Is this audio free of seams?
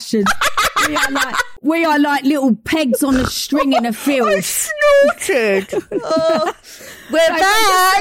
no; 1 cut; at 1.5 s

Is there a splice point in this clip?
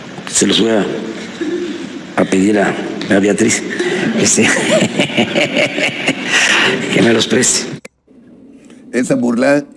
no; 0 cuts

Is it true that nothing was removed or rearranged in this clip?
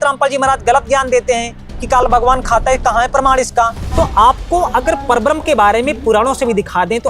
no; 1 cut; at 3.8 s

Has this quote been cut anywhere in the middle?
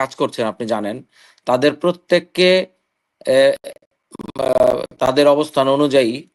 no; 0 cuts

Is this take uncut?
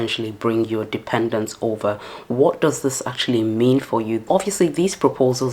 no; 1 cut; at 4.2 s

